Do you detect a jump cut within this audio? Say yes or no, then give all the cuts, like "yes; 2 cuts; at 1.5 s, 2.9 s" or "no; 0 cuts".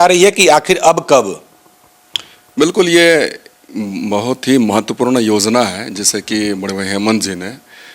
no; 0 cuts